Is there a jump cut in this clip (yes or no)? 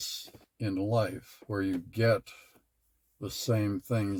no